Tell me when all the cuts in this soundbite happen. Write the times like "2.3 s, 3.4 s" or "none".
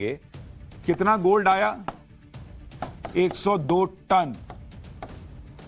none